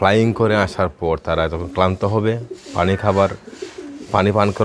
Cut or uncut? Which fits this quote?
uncut